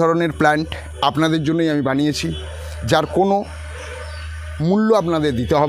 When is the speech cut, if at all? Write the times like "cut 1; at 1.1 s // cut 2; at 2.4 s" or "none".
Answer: none